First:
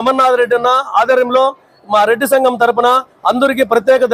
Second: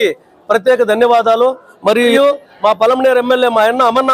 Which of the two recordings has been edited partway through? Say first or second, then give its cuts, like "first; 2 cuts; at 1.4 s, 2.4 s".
second; 1 cut; at 2.1 s